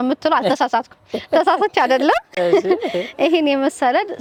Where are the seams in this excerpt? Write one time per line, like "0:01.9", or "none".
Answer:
none